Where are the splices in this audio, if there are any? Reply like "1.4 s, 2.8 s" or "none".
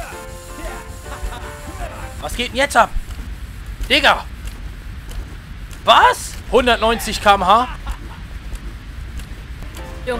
2.2 s